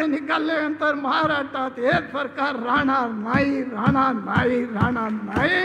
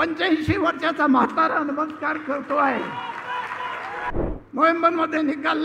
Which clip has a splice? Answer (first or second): second